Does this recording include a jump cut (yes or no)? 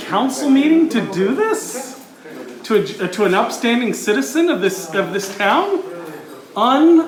no